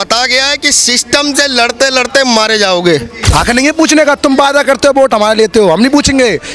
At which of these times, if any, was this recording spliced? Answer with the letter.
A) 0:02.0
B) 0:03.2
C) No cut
B